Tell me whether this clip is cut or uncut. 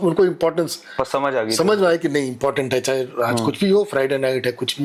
uncut